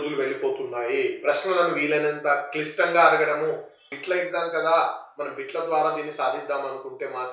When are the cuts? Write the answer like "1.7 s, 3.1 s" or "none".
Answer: 3.9 s